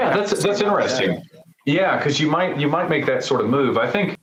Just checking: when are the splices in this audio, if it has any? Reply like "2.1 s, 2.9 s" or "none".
none